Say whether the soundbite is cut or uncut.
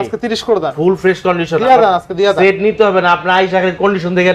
uncut